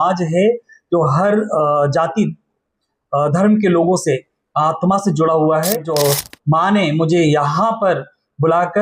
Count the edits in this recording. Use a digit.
1